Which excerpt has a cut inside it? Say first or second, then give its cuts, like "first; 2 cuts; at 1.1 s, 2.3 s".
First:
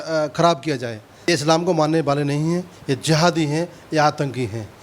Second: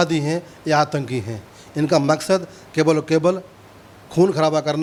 first; 1 cut; at 1.1 s